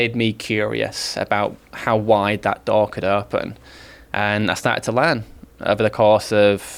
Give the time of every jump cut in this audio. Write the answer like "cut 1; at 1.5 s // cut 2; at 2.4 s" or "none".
none